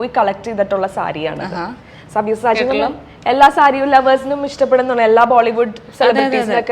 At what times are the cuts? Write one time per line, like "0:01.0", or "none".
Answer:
none

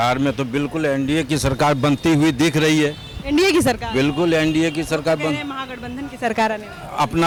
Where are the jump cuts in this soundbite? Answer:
none

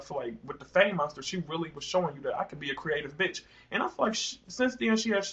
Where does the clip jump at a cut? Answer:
none

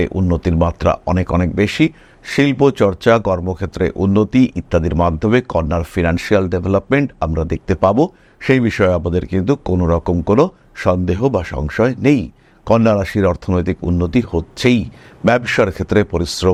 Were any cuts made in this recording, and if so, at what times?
none

